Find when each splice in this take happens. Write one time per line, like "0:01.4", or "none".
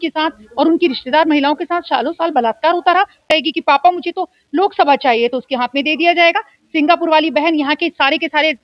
0:03.2